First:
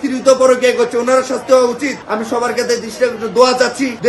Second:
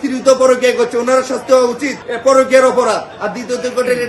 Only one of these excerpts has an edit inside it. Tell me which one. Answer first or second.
first